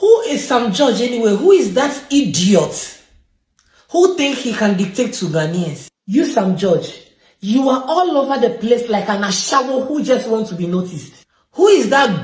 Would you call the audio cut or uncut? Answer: uncut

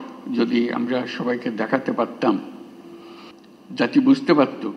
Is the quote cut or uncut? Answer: uncut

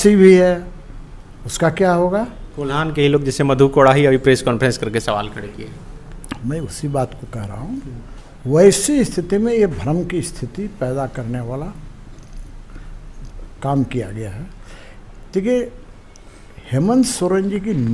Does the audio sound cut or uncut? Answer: uncut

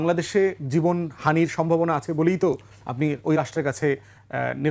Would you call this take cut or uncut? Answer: uncut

